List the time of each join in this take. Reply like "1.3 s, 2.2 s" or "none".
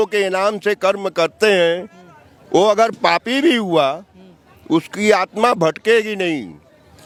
none